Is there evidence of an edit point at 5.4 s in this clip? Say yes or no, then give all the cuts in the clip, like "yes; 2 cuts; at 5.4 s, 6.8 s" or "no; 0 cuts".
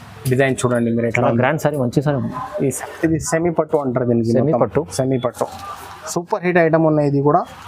no; 1 cut; at 2.7 s